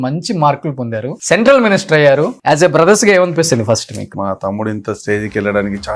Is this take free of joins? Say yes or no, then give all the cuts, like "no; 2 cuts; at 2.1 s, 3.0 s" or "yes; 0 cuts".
no; 3 cuts; at 1.1 s, 2.3 s, 4.2 s